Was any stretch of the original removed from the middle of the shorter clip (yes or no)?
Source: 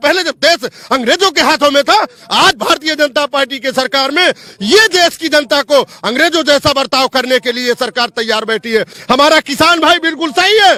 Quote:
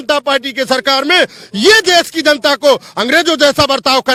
no